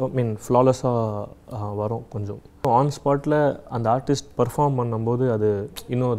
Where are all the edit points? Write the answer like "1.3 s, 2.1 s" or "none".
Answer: 2.7 s